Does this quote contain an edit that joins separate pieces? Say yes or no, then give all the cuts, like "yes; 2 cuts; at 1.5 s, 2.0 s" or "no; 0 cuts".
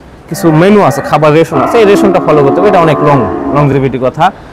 no; 0 cuts